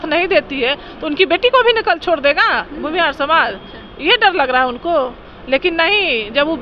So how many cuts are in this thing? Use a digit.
0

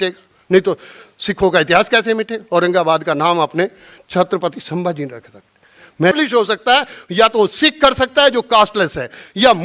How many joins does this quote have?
1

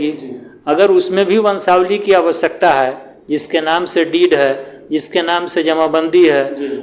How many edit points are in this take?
0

